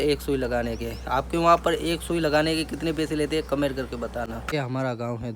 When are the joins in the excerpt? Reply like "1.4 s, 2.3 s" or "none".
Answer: 4.4 s